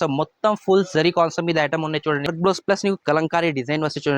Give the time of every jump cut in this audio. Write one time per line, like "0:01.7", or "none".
0:02.3